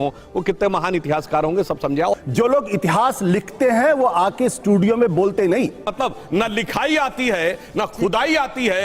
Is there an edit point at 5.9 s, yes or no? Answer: yes